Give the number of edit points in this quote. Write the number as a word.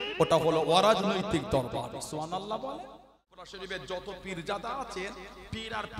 one